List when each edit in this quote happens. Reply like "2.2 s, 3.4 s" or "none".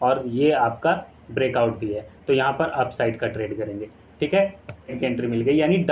5.0 s